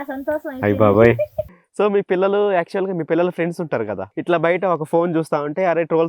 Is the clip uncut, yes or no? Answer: no